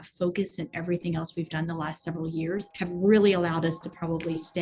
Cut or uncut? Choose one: cut